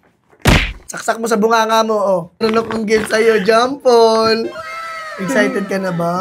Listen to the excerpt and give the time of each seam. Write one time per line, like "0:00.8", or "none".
0:02.4